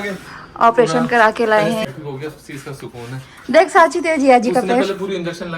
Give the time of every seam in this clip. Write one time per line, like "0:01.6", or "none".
0:01.9